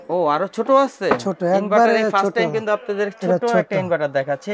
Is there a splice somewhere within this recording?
no; 0 cuts

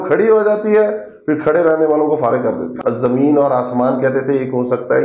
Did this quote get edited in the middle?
yes; 1 cut; at 2.8 s

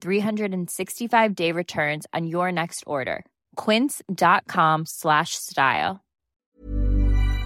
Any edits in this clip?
yes; 1 cut; at 6.5 s

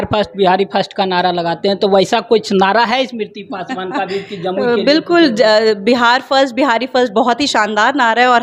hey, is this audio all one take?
yes; 0 cuts

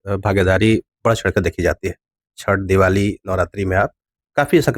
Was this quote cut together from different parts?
no; 0 cuts

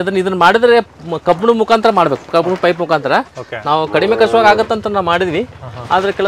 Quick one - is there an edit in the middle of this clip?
no; 0 cuts

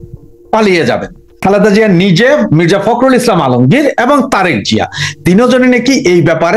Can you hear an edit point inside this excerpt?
yes; 1 cut; at 1.4 s

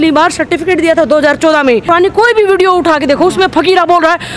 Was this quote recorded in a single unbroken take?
no; 1 cut; at 1.8 s

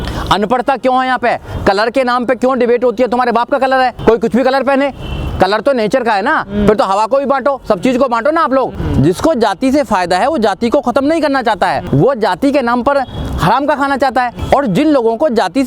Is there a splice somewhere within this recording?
yes; 4 cuts; at 4.0 s, 8.8 s, 11.8 s, 14.4 s

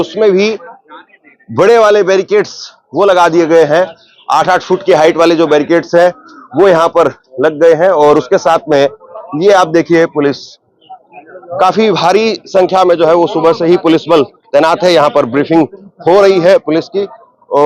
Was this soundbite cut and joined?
no; 0 cuts

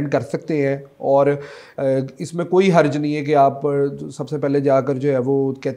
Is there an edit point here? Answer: no; 0 cuts

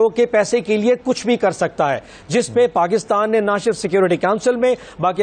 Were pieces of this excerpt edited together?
no; 0 cuts

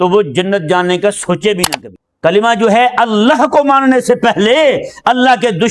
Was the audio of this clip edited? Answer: yes; 1 cut; at 1.6 s

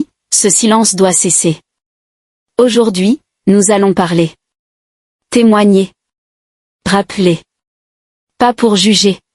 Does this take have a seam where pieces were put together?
no; 0 cuts

